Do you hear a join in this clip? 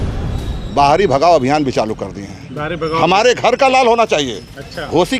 no; 0 cuts

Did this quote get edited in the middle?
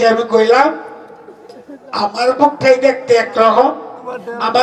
no; 0 cuts

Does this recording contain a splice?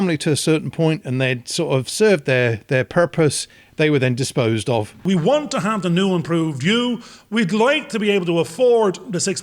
yes; 1 cut; at 5.0 s

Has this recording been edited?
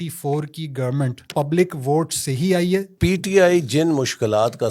yes; 2 cuts; at 1.2 s, 2.9 s

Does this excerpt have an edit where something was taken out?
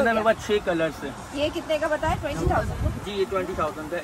no; 0 cuts

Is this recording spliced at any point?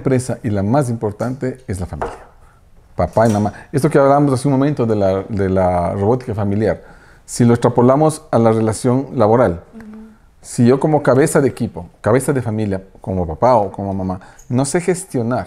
no; 0 cuts

